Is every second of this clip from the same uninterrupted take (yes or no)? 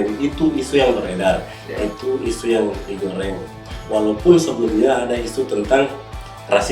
yes